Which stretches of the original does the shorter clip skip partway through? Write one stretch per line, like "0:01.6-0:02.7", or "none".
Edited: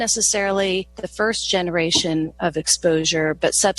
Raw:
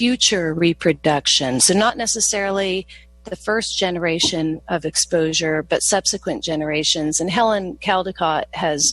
0:03.0-0:03.3